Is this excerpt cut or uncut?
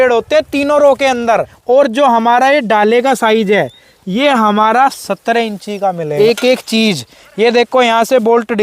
cut